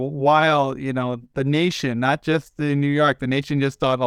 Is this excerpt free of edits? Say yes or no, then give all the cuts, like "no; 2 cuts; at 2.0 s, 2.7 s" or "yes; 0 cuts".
yes; 0 cuts